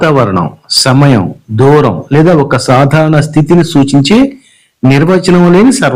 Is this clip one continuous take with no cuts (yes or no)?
yes